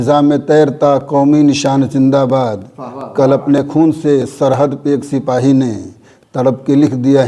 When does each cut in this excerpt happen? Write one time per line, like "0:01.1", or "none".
none